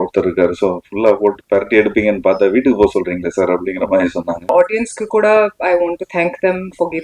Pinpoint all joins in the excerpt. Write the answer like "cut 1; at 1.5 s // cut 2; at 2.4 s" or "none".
cut 1; at 4.5 s